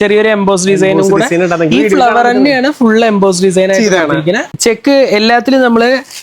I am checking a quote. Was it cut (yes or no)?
yes